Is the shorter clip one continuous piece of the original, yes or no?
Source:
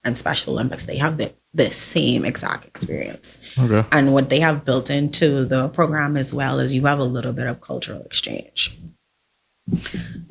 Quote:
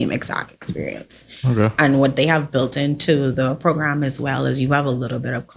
yes